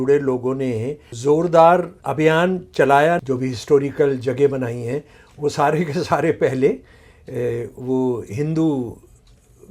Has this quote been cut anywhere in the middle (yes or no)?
yes